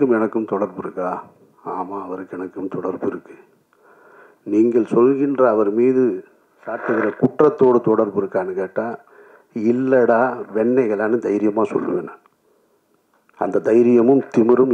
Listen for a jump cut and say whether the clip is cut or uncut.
uncut